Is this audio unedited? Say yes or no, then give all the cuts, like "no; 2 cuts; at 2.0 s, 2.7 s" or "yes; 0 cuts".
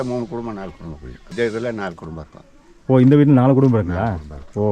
no; 1 cut; at 1.3 s